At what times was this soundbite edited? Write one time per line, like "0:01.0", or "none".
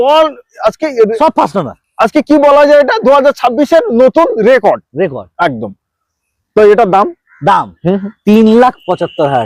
none